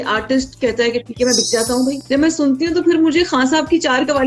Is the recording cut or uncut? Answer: cut